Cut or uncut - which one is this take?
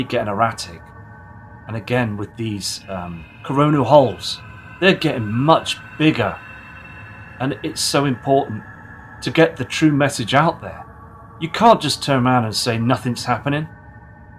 cut